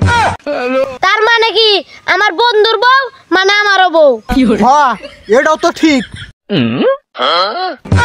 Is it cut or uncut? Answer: cut